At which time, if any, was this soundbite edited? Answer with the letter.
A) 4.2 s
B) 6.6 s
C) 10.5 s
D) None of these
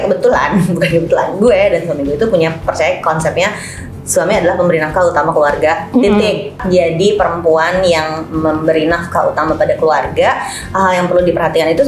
B